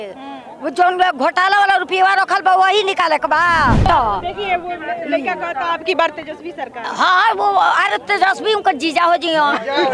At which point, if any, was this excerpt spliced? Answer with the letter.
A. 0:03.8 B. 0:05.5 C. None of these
A